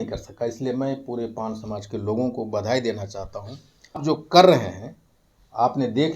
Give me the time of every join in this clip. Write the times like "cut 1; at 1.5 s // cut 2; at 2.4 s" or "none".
cut 1; at 4.0 s